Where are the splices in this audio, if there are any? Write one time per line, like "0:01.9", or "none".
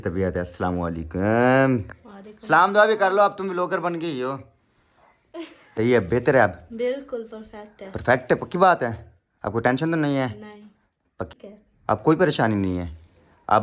0:05.8
0:11.3